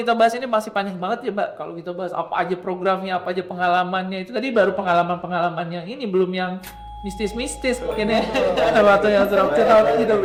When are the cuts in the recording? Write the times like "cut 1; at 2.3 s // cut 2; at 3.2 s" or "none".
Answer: none